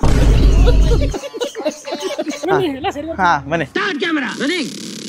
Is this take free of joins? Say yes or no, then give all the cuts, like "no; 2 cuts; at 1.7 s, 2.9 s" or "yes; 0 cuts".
yes; 0 cuts